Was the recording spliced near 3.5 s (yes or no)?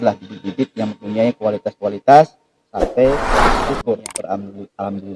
yes